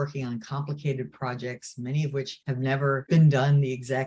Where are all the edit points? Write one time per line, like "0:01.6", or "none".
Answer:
0:02.8